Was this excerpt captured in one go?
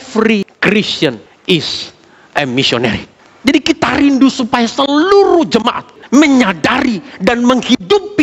no; 2 cuts; at 0.9 s, 5.9 s

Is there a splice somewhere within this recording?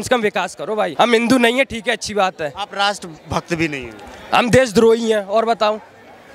yes; 1 cut; at 0.9 s

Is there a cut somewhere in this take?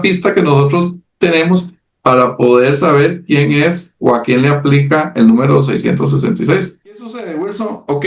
yes; 1 cut; at 7.1 s

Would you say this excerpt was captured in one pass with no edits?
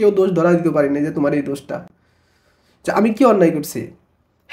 yes; 0 cuts

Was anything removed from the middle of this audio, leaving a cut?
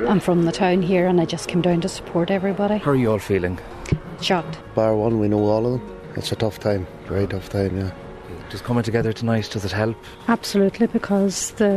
no; 0 cuts

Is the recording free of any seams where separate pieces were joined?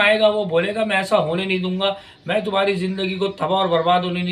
yes; 0 cuts

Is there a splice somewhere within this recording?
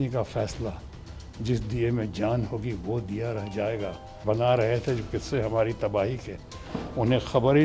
yes; 1 cut; at 4.2 s

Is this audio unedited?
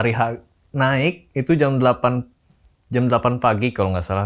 yes; 0 cuts

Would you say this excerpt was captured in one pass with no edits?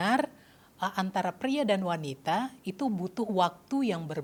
yes; 0 cuts

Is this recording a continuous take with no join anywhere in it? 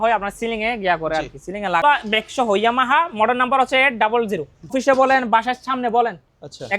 no; 2 cuts; at 1.8 s, 4.7 s

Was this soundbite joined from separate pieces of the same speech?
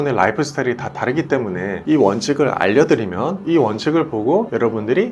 yes; 1 cut; at 1.8 s

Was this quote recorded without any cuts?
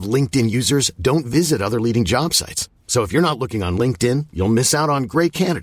yes; 0 cuts

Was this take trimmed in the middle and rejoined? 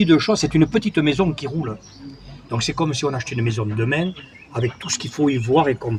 no; 0 cuts

